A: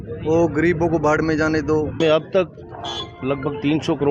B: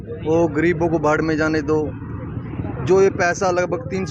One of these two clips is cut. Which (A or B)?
A